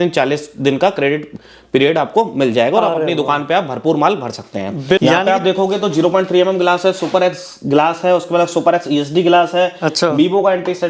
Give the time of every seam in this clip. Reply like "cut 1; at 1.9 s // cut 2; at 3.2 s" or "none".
cut 1; at 5.0 s